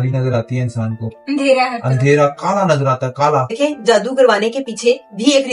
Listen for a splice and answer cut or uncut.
cut